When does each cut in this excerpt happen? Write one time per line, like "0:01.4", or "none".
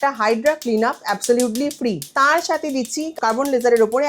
0:02.1
0:03.2